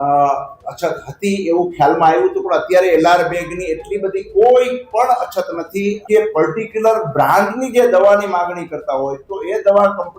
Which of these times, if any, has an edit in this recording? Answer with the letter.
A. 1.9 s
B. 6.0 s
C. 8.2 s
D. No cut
B